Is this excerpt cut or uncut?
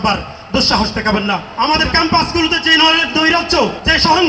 cut